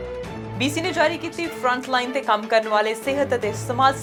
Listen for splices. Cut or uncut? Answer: uncut